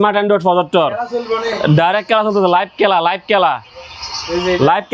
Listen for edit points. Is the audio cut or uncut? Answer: uncut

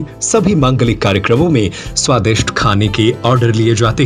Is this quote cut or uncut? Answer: uncut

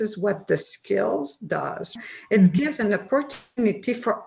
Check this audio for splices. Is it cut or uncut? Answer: cut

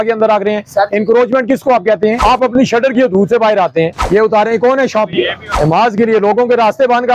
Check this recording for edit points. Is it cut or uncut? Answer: cut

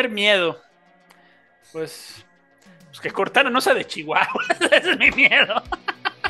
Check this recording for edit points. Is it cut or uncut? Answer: uncut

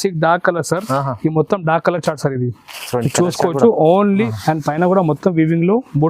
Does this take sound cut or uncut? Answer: cut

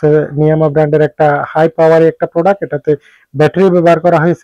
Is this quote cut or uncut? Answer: uncut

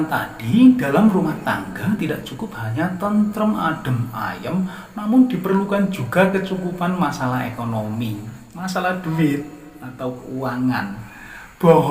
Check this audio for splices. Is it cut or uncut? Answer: uncut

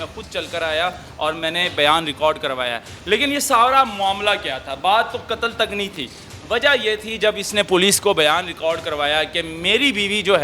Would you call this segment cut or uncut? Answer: cut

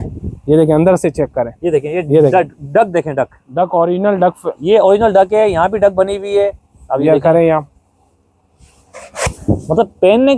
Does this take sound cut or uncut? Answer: uncut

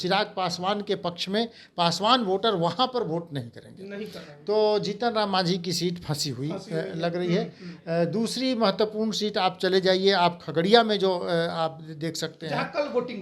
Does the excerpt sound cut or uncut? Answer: uncut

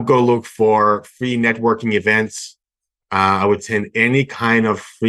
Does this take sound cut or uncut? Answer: uncut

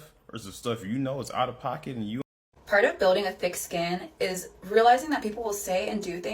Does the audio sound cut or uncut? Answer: cut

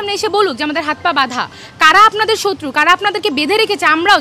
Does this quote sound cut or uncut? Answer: uncut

